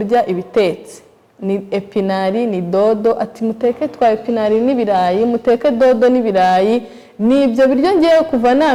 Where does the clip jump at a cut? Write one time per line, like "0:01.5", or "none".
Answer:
none